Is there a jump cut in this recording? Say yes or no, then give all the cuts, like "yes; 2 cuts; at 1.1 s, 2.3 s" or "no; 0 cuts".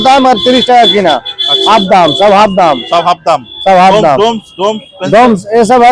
no; 0 cuts